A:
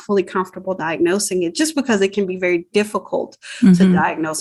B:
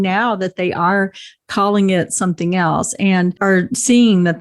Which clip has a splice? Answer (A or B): B